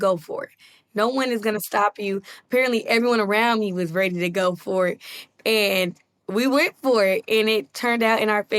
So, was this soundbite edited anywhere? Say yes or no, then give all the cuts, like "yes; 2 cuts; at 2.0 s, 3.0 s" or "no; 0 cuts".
no; 0 cuts